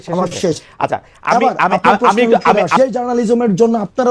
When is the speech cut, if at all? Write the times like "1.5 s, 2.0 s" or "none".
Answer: 2.8 s